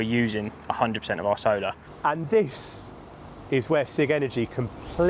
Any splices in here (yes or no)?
yes